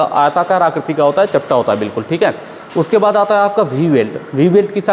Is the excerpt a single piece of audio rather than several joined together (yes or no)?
yes